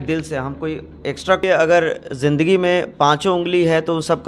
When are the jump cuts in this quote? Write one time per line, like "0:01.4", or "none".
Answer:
0:01.4